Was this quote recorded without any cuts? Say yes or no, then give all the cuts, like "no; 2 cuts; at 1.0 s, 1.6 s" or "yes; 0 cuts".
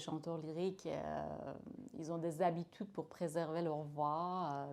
yes; 0 cuts